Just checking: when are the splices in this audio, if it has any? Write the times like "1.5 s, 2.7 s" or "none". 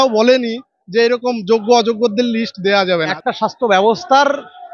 3.1 s